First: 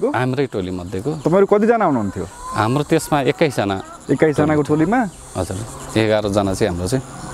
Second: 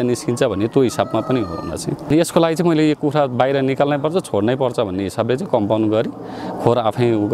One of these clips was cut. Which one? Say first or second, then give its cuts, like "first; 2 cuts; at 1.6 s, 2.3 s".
second; 1 cut; at 2.1 s